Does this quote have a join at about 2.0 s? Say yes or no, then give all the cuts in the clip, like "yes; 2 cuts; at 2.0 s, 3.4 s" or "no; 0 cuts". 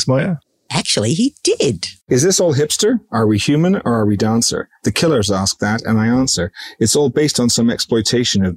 yes; 1 cut; at 2.0 s